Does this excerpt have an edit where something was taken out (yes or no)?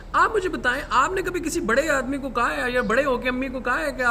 no